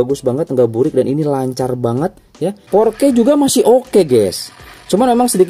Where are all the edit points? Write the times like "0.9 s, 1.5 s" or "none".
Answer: 2.6 s